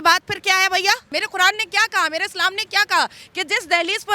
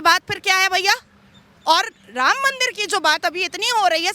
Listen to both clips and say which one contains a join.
first; 1 cut; at 1.1 s

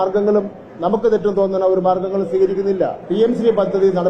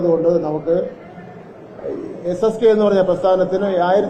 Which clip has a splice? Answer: first; 1 cut; at 3.0 s

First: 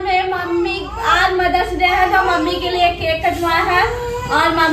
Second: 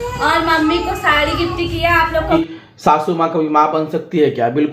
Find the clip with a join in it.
second; 1 cut; at 2.3 s

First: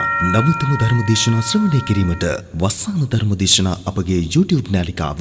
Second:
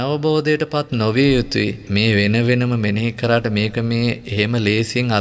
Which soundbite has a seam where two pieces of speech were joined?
second; 1 cut; at 1.8 s

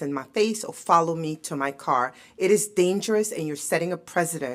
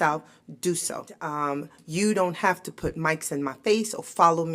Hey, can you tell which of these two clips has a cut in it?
second; 1 cut; at 1.2 s

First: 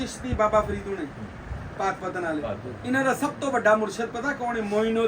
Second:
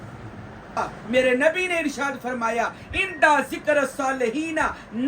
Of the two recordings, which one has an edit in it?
second; 1 cut; at 1.0 s

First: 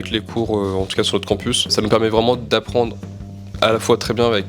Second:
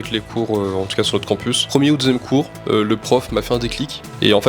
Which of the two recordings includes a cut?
second; 1 cut; at 1.6 s

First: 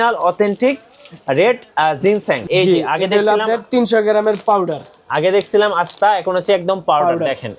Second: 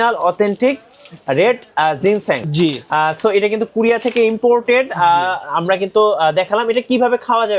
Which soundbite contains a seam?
first; 1 cut; at 2.4 s

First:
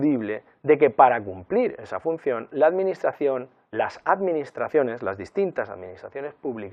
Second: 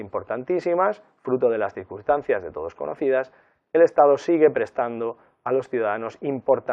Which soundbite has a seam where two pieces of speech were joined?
second; 1 cut; at 4.9 s

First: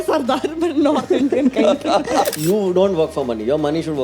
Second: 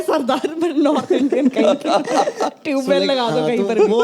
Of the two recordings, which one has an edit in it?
first; 1 cut; at 2.3 s

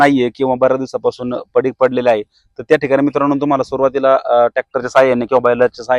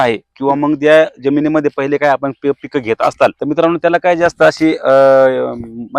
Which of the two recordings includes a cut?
second; 1 cut; at 3.4 s

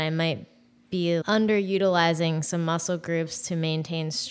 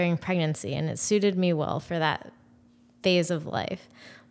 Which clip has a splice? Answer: first; 1 cut; at 1.2 s

